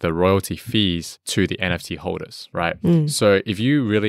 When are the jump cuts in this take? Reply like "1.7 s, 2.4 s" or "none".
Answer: 2.4 s